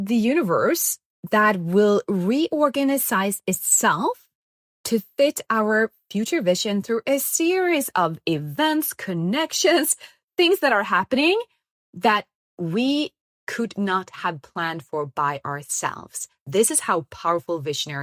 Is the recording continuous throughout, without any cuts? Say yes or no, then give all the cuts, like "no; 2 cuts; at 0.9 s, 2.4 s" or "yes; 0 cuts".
yes; 0 cuts